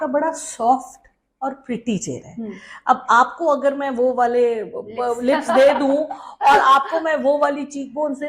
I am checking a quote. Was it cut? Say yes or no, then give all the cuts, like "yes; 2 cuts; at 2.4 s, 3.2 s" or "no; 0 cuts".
no; 0 cuts